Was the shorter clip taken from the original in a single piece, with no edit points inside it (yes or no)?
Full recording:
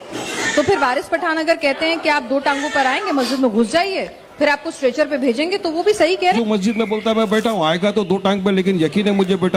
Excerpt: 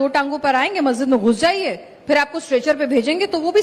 yes